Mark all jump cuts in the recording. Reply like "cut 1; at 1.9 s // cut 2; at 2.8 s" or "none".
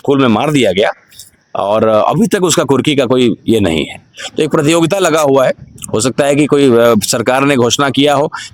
none